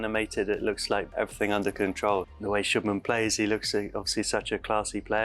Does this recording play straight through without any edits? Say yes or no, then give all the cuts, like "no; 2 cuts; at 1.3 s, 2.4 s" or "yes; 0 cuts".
no; 2 cuts; at 1.1 s, 2.3 s